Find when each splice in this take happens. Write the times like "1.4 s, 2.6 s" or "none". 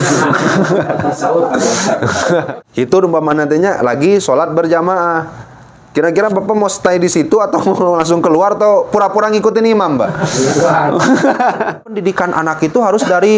2.5 s, 12.0 s